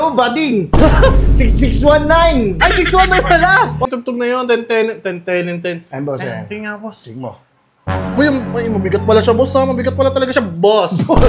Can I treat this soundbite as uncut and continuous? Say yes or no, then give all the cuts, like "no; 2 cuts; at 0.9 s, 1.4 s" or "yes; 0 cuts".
no; 1 cut; at 3.8 s